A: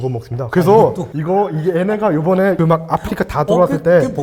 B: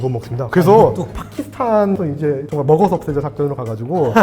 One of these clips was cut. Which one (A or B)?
B